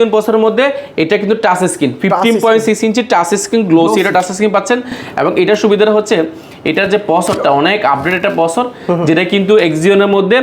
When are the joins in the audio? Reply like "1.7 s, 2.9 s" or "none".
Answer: none